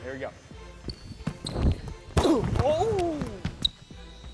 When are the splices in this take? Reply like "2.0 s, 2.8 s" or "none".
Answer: 3.4 s